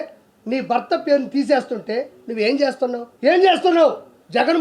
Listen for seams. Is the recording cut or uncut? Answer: cut